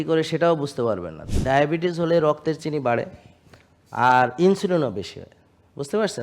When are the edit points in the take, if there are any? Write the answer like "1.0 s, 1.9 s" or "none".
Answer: 1.2 s